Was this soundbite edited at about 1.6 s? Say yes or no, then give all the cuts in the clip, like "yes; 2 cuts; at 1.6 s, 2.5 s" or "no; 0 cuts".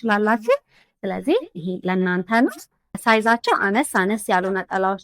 no; 1 cut; at 3.0 s